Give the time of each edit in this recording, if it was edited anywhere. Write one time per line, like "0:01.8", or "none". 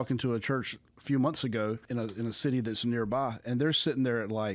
0:01.8